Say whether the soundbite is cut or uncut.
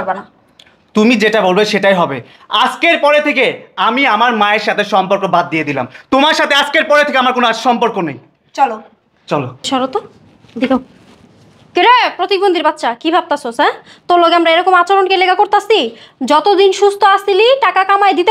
cut